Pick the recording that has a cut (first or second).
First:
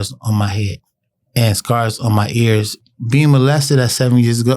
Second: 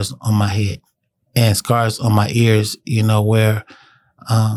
first